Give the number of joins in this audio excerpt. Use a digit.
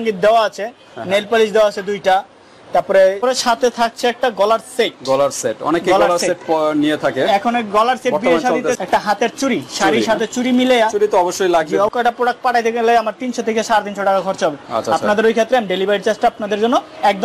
3